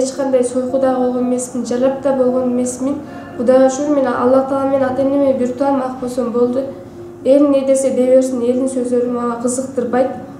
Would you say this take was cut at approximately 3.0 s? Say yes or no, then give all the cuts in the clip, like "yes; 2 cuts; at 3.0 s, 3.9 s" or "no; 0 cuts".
no; 0 cuts